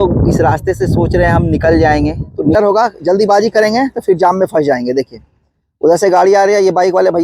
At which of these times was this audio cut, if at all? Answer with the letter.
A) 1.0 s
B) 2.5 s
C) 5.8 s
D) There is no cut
B